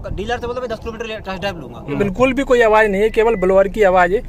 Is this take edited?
yes; 1 cut; at 2.0 s

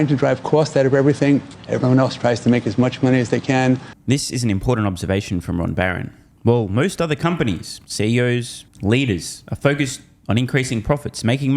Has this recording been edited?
no; 0 cuts

